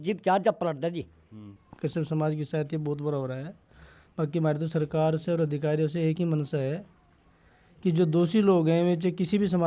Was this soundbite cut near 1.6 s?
yes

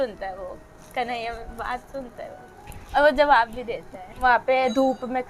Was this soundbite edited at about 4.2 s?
yes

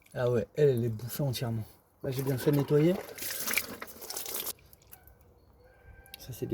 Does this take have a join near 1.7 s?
no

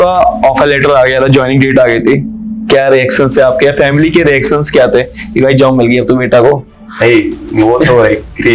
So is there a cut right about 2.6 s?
no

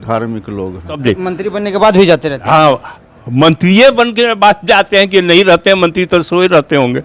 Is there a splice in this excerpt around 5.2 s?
no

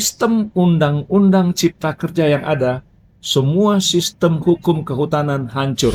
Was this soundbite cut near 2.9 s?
no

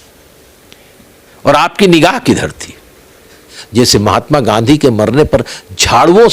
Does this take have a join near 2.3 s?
no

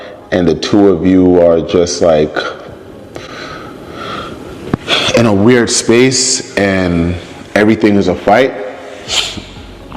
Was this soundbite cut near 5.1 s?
no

